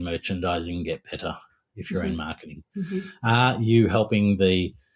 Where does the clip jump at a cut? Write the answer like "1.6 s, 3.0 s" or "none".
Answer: none